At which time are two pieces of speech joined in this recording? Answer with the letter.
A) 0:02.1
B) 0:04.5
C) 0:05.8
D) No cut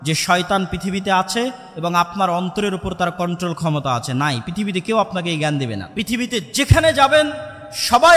C